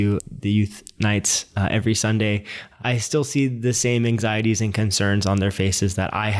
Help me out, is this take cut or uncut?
uncut